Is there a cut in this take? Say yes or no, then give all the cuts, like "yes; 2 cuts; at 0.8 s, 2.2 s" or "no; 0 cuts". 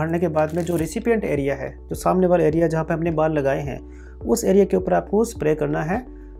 no; 0 cuts